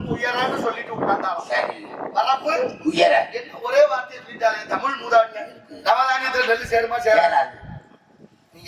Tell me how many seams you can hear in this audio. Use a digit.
1